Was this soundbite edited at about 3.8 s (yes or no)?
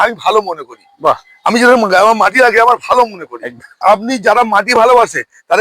yes